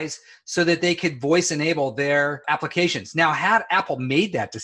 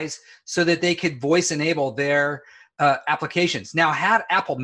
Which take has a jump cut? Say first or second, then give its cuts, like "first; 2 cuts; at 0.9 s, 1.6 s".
first; 1 cut; at 2.4 s